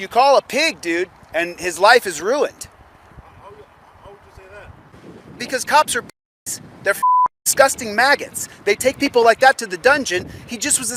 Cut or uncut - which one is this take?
uncut